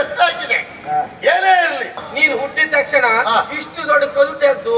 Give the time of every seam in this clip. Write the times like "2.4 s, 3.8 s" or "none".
2.1 s